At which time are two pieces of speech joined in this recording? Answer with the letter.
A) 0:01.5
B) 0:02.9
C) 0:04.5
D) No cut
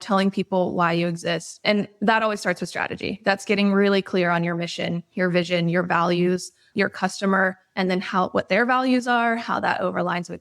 A